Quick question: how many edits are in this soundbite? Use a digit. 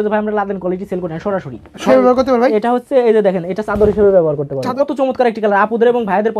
2